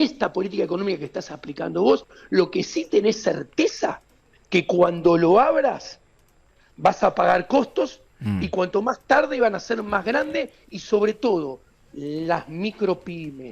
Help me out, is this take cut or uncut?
uncut